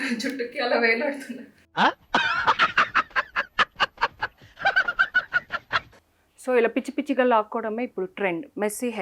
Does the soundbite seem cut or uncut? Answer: cut